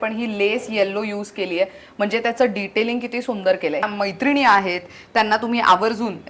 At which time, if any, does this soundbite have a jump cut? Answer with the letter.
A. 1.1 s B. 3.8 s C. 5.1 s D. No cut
B